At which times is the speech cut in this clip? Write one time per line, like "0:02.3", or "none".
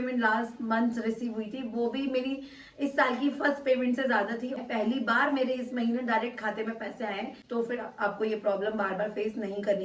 0:04.6
0:07.3